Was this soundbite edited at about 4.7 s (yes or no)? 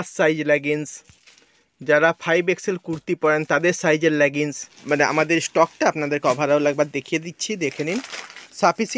yes